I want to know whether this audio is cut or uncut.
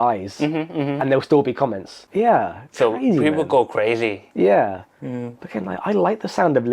cut